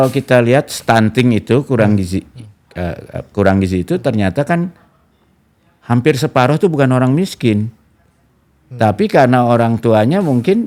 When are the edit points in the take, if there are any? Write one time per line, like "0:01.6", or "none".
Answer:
none